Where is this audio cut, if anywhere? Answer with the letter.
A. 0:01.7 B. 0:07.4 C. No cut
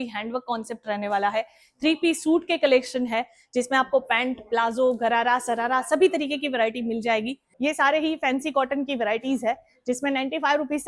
B